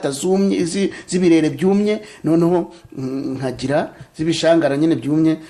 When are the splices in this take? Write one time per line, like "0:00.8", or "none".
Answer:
none